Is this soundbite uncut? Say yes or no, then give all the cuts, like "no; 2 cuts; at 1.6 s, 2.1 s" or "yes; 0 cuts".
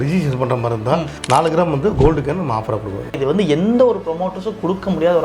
no; 1 cut; at 3.2 s